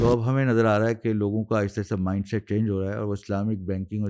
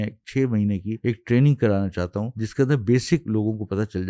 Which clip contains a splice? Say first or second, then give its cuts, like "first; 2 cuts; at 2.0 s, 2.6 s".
second; 3 cuts; at 0.9 s, 2.4 s, 3.2 s